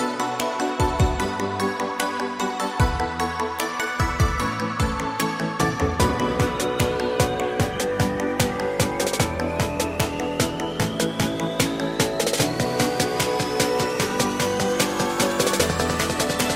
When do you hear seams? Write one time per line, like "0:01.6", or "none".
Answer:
none